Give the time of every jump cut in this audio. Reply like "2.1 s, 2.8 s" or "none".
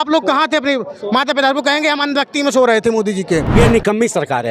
3.5 s